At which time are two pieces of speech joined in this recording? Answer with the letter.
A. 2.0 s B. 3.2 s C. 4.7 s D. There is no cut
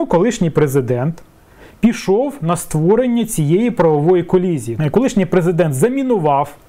C